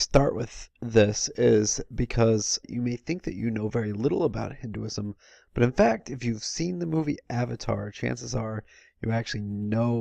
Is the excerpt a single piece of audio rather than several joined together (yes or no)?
no